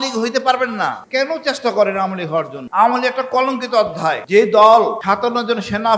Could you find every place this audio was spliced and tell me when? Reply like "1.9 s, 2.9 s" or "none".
1.0 s, 2.6 s, 4.2 s, 5.0 s